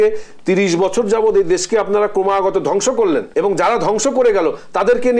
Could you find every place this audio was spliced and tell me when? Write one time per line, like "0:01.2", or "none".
0:03.3